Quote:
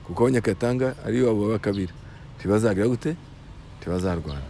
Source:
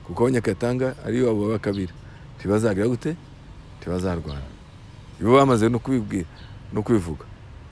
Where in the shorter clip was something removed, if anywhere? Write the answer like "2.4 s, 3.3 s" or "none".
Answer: none